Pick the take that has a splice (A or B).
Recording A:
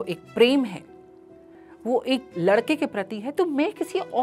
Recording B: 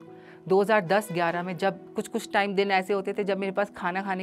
B